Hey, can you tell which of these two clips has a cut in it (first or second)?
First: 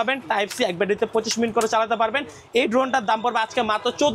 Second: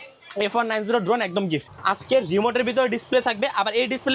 second